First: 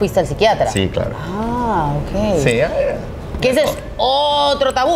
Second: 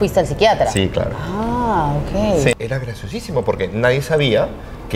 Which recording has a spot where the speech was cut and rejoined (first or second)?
second